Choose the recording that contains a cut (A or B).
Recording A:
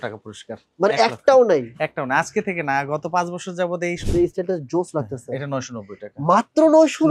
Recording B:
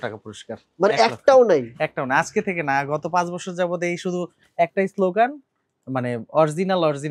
A